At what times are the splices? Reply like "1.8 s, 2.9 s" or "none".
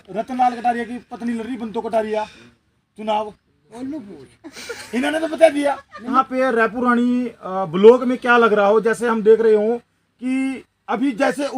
6.1 s